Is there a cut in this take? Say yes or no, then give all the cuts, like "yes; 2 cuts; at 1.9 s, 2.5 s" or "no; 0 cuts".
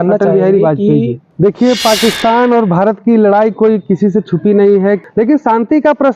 yes; 2 cuts; at 1.2 s, 5.0 s